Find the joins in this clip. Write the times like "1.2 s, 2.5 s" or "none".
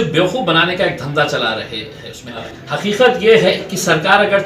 2.5 s